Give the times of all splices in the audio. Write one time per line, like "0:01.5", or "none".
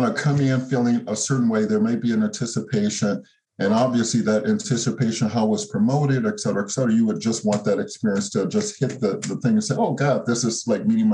none

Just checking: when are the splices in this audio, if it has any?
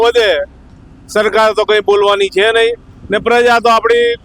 none

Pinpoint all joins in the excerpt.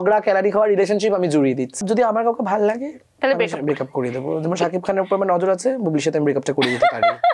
0:01.8

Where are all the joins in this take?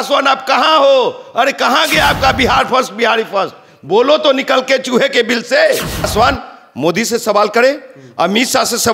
0:06.1

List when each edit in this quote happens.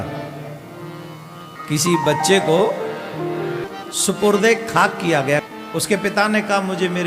0:01.5
0:03.6
0:05.5

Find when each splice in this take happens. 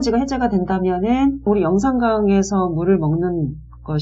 0:01.5

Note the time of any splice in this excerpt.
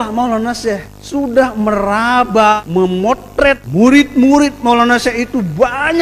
0:00.9
0:02.6
0:03.6

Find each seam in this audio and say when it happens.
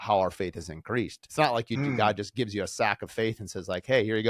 0:01.2

